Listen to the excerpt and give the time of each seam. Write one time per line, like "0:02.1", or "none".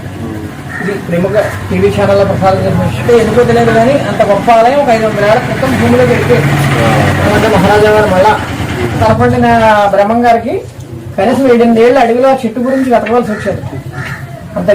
0:03.0
0:07.3
0:09.0